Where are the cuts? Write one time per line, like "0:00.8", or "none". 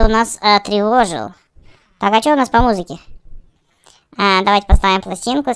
none